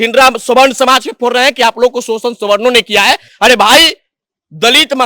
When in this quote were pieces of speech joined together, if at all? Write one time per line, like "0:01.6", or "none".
none